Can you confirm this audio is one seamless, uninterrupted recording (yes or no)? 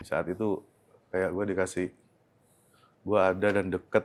yes